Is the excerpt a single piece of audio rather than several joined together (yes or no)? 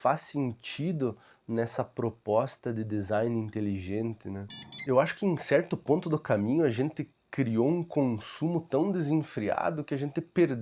no